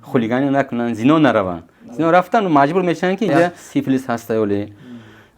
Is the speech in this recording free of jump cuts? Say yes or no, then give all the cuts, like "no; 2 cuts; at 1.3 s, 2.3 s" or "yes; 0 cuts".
no; 1 cut; at 3.6 s